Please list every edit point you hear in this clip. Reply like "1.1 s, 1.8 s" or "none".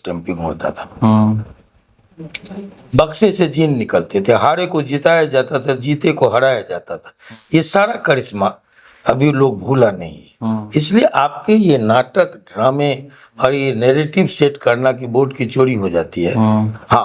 none

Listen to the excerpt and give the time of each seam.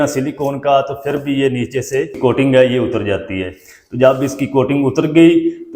2.1 s

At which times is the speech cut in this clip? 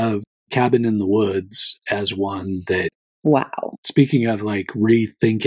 3.0 s, 3.8 s

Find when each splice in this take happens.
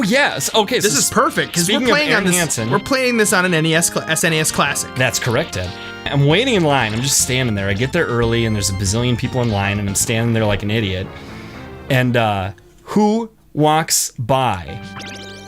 6.1 s

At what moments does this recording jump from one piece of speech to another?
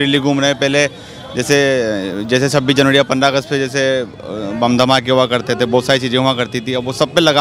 none

